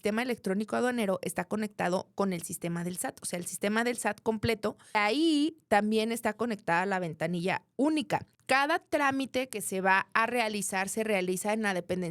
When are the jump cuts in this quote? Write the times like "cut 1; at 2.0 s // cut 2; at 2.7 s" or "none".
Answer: cut 1; at 5.0 s // cut 2; at 8.3 s